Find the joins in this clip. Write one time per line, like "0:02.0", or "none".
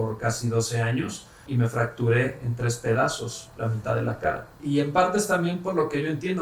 0:01.5
0:04.6